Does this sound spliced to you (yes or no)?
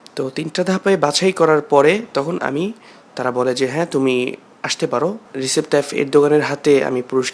yes